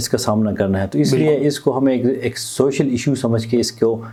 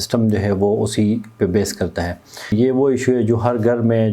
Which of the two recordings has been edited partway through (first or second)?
second